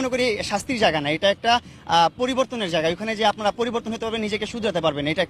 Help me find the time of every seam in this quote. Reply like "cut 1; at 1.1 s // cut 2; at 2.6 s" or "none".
none